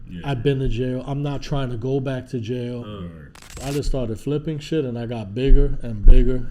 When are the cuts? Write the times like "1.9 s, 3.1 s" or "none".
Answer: 3.6 s